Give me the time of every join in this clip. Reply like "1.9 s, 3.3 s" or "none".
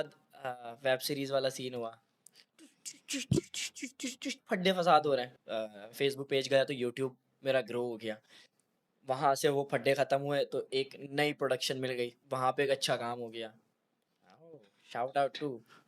5.3 s, 12.2 s

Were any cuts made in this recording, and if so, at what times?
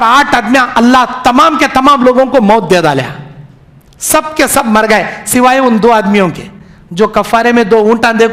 none

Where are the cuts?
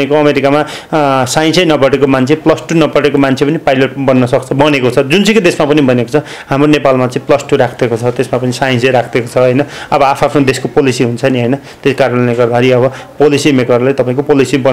none

